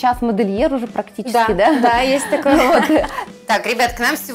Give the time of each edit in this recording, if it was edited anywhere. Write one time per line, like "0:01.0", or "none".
0:03.2